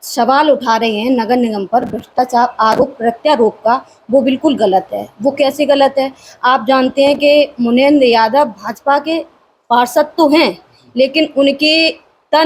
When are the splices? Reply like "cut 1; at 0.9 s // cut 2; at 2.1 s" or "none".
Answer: none